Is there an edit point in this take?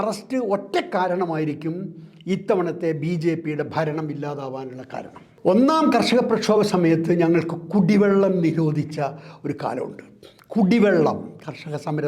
yes; 1 cut; at 5.2 s

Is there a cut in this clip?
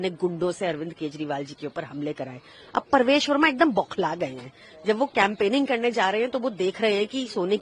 no; 0 cuts

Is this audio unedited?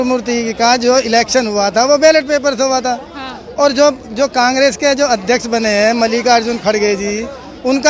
yes; 0 cuts

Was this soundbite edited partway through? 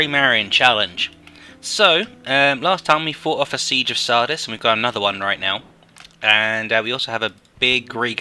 no; 0 cuts

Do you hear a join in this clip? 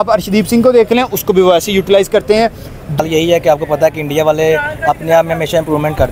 yes; 1 cut; at 3.0 s

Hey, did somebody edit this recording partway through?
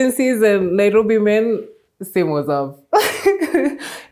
no; 0 cuts

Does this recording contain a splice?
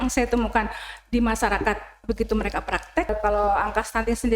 yes; 1 cut; at 3.1 s

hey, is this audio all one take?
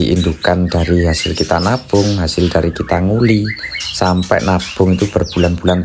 yes; 0 cuts

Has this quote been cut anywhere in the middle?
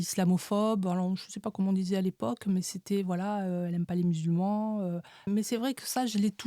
yes; 1 cut; at 5.3 s

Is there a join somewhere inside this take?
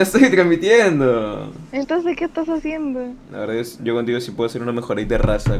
yes; 1 cut; at 3.2 s

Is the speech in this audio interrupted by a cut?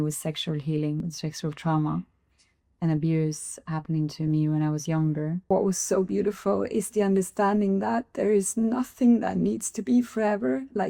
yes; 2 cuts; at 1.1 s, 5.4 s

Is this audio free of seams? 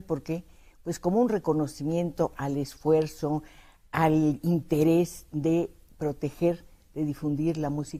yes; 0 cuts

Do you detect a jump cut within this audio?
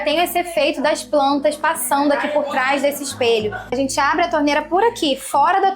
yes; 1 cut; at 3.7 s

